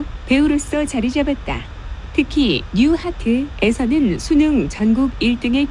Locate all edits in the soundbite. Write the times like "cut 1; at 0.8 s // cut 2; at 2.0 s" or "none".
none